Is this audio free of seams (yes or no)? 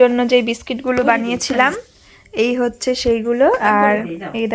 yes